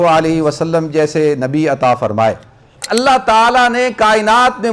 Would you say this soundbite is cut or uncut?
cut